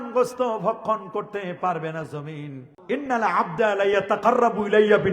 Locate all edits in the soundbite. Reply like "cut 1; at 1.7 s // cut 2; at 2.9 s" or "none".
cut 1; at 2.7 s